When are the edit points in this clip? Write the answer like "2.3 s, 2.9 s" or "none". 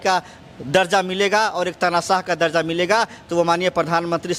none